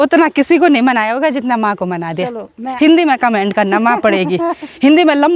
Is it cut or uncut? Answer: cut